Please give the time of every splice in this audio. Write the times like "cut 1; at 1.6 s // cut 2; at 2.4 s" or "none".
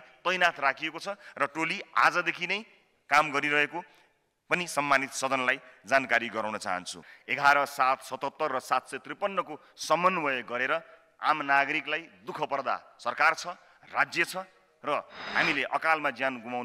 cut 1; at 7.2 s